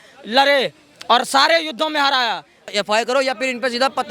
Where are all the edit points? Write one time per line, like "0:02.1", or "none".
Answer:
0:02.7